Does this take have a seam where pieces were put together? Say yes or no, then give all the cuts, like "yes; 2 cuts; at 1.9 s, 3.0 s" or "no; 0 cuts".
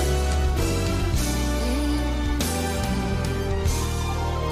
no; 0 cuts